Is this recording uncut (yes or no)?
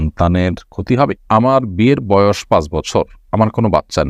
no